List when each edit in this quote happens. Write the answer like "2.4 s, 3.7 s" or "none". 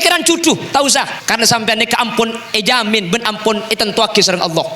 1.2 s